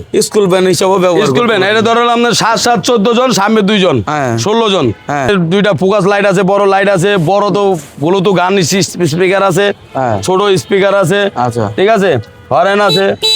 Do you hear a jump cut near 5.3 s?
yes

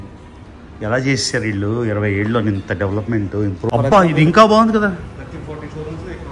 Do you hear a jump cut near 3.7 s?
yes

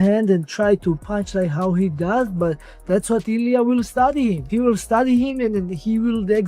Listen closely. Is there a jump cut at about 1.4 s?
no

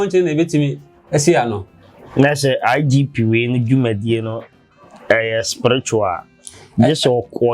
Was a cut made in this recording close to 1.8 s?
no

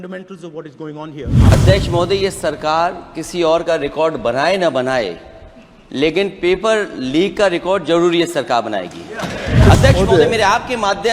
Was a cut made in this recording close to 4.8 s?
no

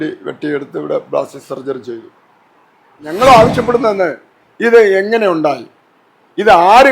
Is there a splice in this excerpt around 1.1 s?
no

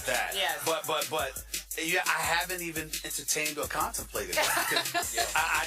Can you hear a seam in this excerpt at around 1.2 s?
no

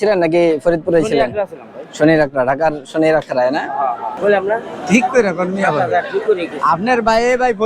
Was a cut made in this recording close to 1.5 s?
no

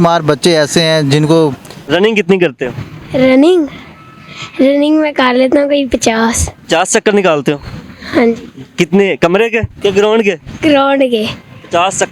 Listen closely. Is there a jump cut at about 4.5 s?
no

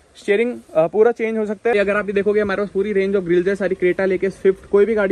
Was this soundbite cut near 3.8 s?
no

